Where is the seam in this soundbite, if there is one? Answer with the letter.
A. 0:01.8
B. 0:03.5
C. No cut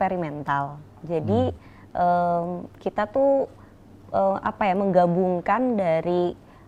C